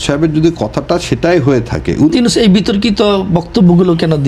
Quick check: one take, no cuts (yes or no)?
no